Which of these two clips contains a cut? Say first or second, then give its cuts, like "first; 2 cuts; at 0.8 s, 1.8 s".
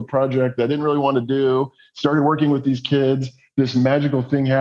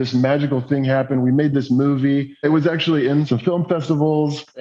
second; 2 cuts; at 2.4 s, 3.3 s